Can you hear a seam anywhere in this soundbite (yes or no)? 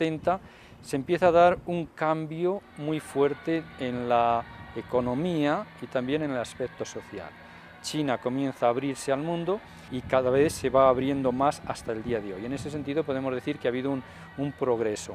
no